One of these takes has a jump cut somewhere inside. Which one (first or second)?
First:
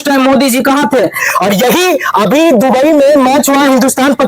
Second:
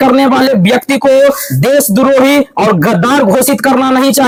first